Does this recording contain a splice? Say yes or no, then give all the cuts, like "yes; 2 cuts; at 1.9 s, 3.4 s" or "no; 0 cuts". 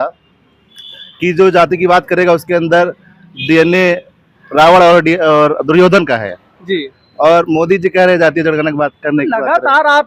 no; 0 cuts